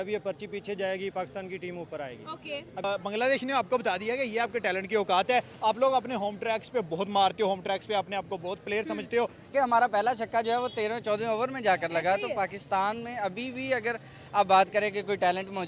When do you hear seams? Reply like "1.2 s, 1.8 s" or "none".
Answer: 2.8 s, 9.5 s